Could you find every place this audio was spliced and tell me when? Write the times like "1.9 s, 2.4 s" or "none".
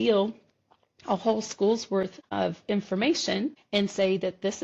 2.2 s, 3.6 s